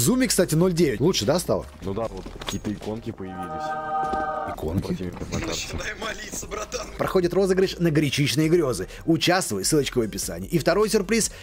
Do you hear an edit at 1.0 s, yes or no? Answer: yes